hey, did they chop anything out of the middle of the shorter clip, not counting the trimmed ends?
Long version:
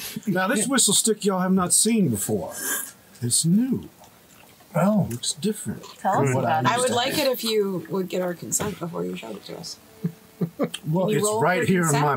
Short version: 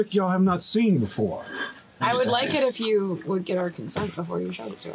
yes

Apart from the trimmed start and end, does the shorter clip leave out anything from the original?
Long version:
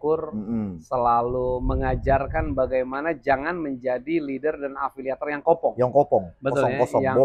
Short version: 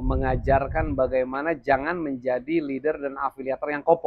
no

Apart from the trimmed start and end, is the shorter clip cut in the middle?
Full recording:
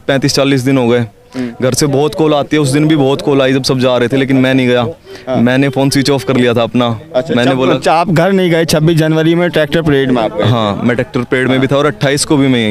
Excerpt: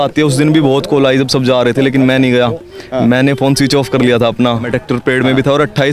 yes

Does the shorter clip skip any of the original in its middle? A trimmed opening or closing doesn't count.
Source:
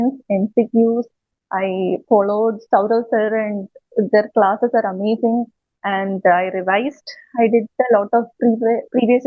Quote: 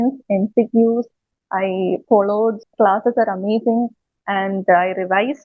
yes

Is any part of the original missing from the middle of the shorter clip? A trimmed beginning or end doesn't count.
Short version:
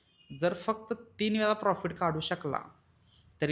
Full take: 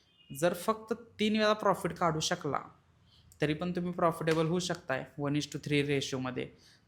no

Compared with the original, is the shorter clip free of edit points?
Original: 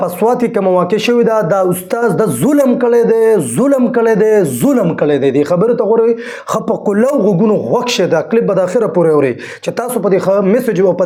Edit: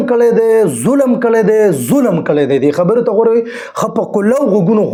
yes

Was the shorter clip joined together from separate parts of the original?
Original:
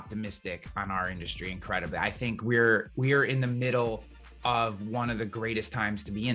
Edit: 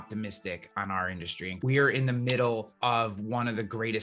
yes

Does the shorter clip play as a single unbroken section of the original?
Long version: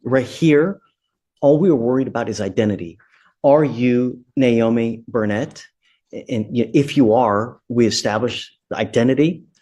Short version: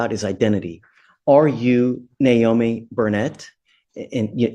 yes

